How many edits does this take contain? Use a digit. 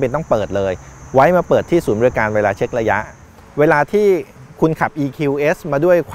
1